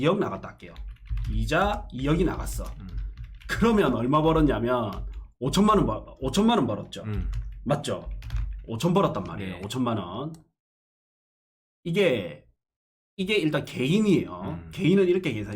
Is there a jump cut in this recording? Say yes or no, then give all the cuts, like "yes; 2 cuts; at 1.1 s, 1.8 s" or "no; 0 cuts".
no; 0 cuts